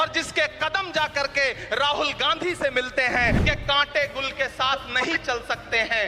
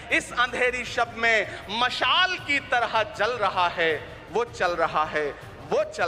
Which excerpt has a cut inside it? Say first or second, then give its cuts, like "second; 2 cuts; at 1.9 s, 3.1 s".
first; 1 cut; at 3.4 s